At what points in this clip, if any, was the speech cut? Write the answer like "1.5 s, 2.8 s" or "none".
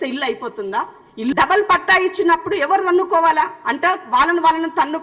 1.3 s